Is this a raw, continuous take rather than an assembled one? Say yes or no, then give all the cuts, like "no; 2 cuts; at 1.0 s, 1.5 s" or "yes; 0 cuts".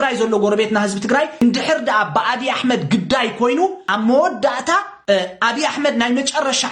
no; 3 cuts; at 1.4 s, 3.8 s, 4.9 s